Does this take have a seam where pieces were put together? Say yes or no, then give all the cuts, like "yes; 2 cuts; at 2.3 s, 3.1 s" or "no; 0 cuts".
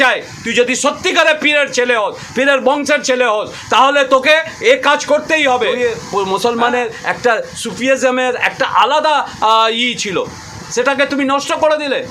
no; 0 cuts